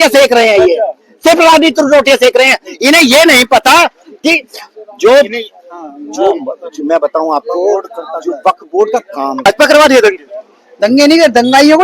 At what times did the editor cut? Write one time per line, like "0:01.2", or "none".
0:09.5

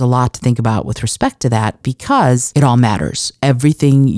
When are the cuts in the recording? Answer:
0:02.5

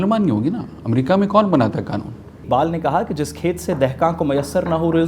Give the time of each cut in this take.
0:02.4

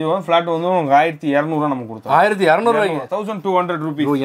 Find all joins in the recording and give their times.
none

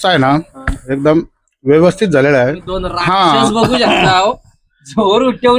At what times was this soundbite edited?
0:02.9

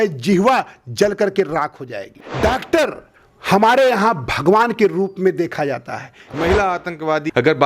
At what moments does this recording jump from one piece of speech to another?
0:02.2
0:06.2

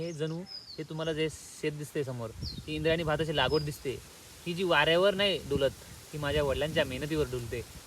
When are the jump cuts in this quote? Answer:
none

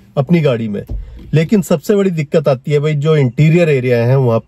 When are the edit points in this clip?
none

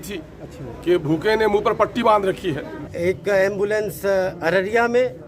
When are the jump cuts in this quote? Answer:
0:02.8

